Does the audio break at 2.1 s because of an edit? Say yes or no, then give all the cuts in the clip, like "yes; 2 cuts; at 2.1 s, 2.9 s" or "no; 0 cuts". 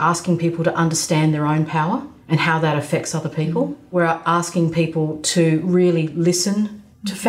yes; 2 cuts; at 2.1 s, 3.9 s